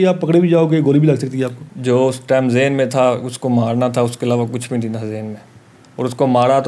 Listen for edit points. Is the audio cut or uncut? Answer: cut